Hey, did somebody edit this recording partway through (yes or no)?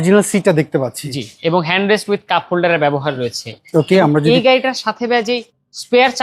no